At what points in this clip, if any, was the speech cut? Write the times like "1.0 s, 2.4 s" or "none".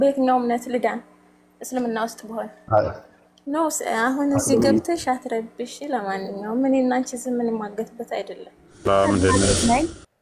8.9 s